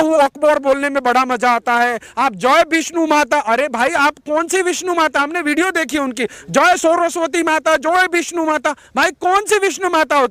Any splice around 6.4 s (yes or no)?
no